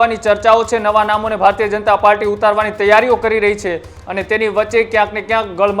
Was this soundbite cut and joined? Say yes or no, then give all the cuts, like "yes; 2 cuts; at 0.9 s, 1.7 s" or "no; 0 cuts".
no; 0 cuts